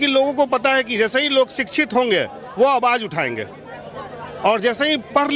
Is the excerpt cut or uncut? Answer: uncut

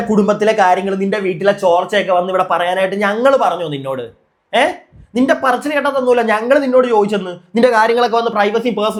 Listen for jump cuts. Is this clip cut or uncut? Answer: uncut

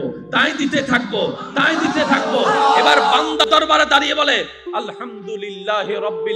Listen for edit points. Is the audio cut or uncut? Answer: cut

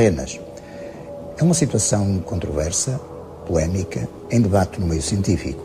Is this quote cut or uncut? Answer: uncut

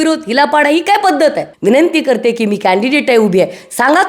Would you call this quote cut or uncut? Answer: cut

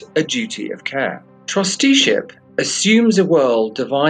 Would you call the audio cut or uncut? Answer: cut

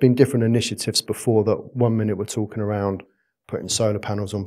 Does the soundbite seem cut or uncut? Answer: uncut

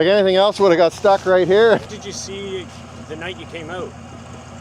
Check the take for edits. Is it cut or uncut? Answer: cut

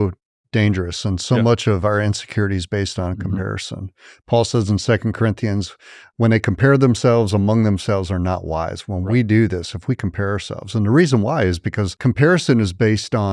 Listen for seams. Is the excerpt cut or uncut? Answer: cut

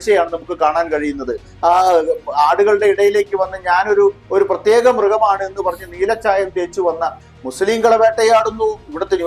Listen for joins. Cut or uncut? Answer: cut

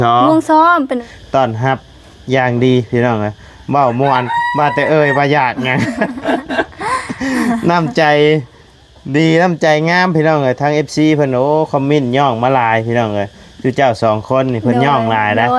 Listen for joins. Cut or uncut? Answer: cut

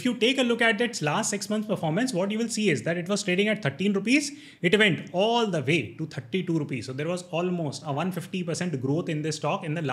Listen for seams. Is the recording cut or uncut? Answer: uncut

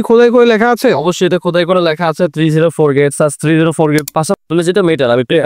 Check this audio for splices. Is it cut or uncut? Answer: cut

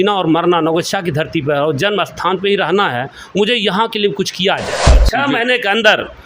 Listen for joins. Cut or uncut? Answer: cut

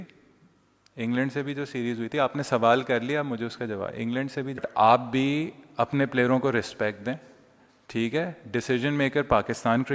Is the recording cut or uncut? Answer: cut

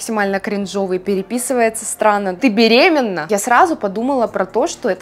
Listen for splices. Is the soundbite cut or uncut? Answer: cut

